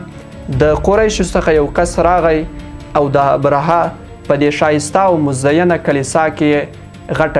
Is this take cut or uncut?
uncut